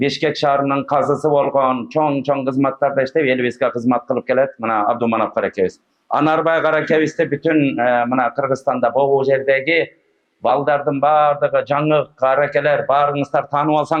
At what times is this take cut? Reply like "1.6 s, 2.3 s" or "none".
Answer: none